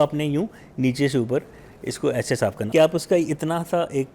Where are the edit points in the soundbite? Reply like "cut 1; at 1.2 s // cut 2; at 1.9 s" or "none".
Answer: cut 1; at 2.6 s